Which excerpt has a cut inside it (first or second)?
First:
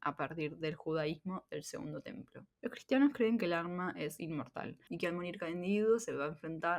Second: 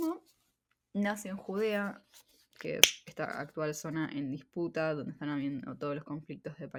first